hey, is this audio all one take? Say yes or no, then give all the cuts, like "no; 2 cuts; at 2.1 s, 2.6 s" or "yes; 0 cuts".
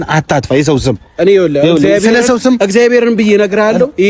yes; 0 cuts